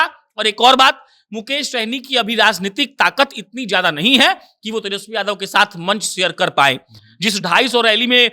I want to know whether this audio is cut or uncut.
uncut